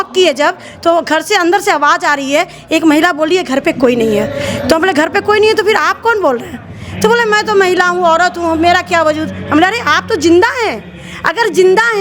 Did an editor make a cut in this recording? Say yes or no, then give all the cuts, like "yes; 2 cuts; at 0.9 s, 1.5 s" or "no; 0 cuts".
no; 0 cuts